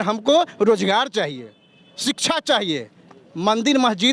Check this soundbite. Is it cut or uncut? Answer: uncut